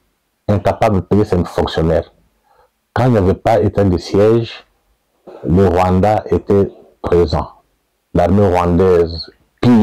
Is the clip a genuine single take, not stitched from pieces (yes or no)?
yes